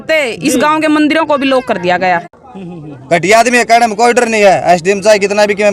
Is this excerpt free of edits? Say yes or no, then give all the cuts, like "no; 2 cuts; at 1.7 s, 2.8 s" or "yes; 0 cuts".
no; 1 cut; at 2.3 s